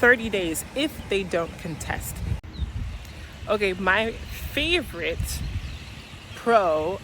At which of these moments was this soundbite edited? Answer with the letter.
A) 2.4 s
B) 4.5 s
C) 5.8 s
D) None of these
A